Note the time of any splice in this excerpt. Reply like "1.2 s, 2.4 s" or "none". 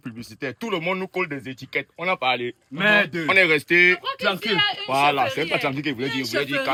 none